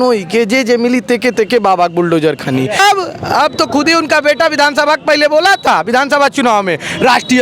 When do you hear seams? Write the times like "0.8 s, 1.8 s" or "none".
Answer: 2.8 s